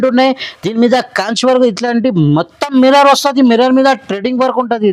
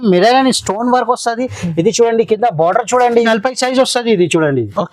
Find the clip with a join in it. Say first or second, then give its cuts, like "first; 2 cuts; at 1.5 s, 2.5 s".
second; 1 cut; at 3.3 s